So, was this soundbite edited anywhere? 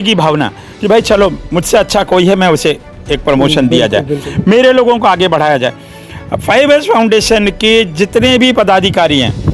no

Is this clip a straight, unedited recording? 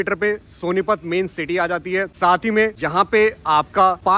yes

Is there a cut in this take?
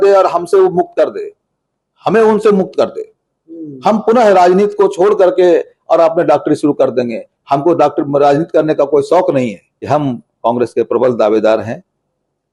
yes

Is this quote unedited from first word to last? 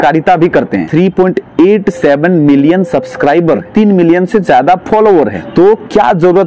no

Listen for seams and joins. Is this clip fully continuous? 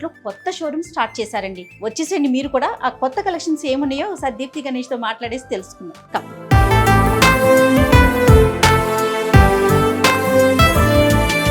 no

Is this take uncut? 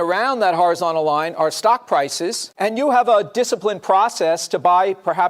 no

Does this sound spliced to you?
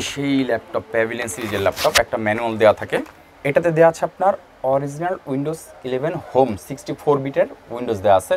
yes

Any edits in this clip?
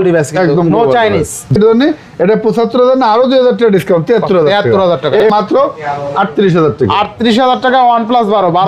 yes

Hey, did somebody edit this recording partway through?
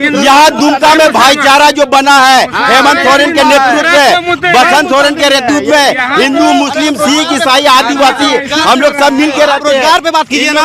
no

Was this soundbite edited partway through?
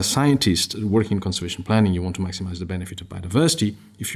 no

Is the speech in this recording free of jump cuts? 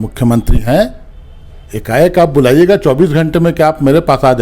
yes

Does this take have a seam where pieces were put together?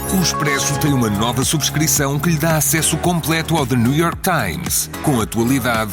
no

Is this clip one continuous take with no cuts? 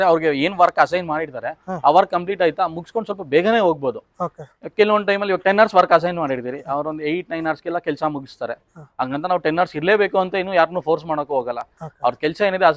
yes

